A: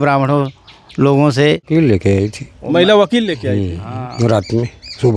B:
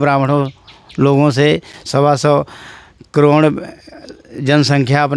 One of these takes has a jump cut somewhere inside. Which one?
A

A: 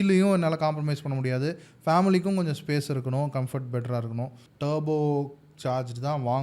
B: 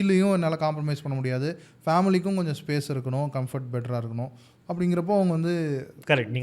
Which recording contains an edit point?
A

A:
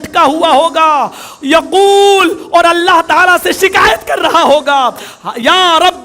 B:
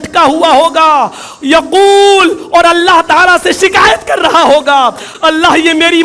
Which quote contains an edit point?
B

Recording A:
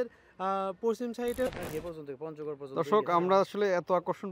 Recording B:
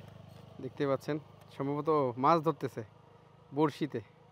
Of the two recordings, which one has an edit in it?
A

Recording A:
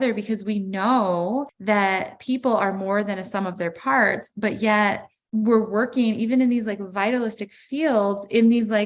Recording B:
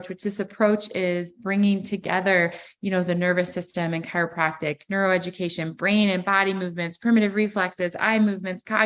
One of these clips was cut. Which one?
A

